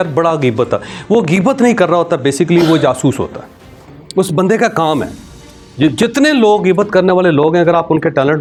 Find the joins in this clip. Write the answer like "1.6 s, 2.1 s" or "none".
none